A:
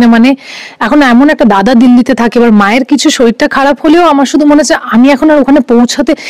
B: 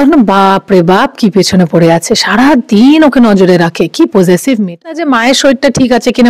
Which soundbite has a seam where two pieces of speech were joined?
B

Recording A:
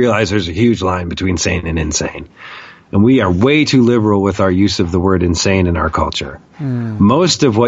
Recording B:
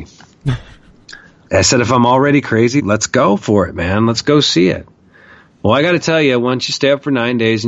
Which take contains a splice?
B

